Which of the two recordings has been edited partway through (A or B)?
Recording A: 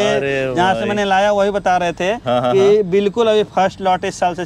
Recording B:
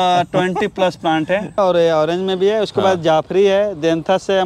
B